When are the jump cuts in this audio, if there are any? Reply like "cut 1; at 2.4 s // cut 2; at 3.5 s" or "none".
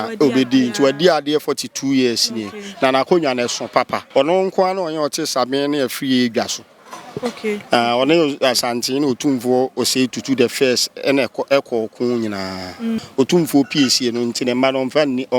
cut 1; at 4.0 s // cut 2; at 13.0 s